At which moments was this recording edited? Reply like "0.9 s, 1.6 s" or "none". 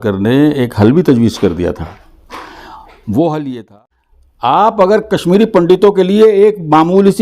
3.6 s